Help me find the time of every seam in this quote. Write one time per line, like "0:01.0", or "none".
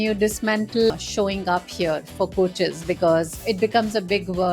0:00.9